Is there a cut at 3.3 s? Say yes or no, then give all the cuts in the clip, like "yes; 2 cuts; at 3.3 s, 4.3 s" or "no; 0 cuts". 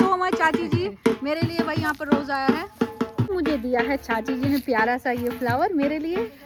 no; 0 cuts